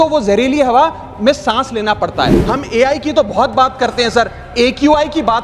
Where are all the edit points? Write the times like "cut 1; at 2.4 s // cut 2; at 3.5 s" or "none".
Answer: cut 1; at 2.4 s